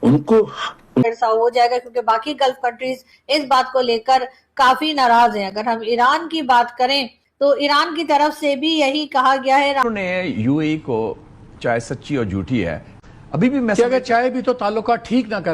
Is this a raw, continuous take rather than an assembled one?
no; 2 cuts; at 1.0 s, 9.8 s

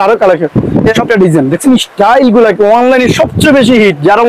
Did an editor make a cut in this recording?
yes; 1 cut; at 1.0 s

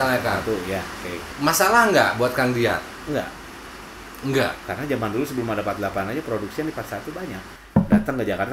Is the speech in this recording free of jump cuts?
no; 3 cuts; at 1.2 s, 2.9 s, 7.5 s

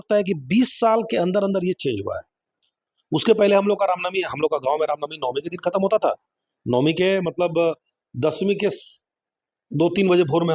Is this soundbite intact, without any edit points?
yes; 0 cuts

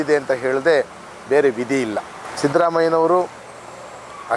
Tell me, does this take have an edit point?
no; 0 cuts

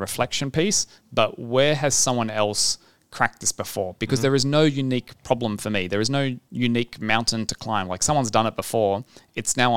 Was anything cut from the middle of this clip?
yes; 1 cut; at 6.4 s

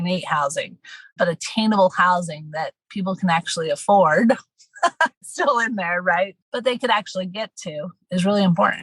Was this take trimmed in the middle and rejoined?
yes; 2 cuts; at 5.2 s, 7.9 s

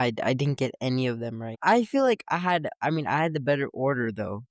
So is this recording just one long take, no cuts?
no; 1 cut; at 1.6 s

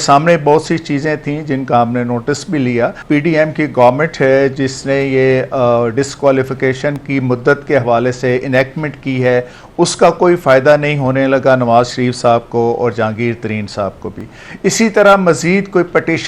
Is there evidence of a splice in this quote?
yes; 1 cut; at 3.0 s

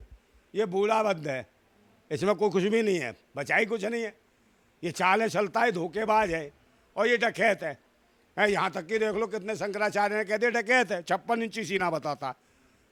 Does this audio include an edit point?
no; 0 cuts

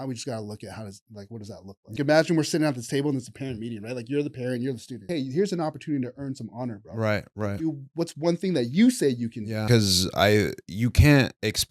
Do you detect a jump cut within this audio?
yes; 3 cuts; at 2.0 s, 5.1 s, 9.7 s

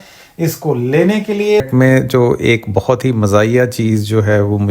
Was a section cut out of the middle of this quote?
yes; 1 cut; at 1.6 s

